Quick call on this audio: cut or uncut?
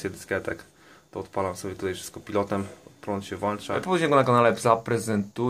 cut